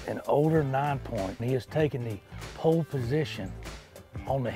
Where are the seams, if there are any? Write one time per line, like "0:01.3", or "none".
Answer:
0:01.4